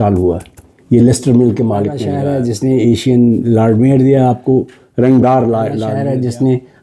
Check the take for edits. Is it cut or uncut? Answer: cut